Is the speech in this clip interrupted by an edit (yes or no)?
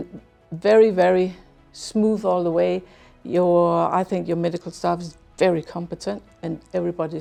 no